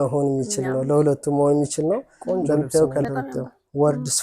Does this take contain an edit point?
yes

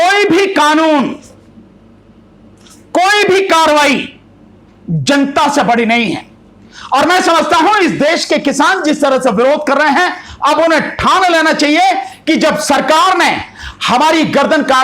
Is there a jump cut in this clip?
no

